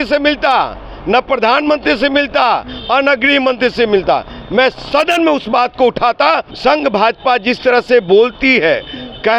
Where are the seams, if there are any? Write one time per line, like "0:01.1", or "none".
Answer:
0:06.5